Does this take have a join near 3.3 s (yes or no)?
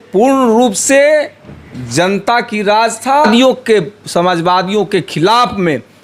yes